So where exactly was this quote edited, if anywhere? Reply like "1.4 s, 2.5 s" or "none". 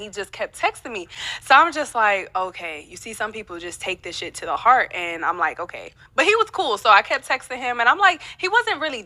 none